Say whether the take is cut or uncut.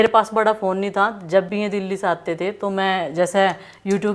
uncut